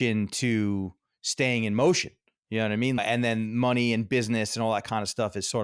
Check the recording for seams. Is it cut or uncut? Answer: cut